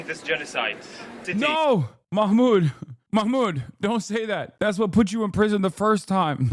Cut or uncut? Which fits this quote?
cut